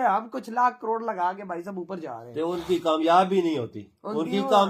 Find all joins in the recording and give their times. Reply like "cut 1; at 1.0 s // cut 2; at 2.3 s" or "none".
none